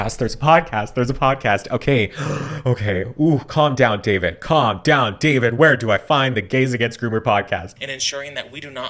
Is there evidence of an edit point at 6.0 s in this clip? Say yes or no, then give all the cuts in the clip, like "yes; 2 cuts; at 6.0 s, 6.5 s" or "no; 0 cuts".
no; 1 cut; at 7.7 s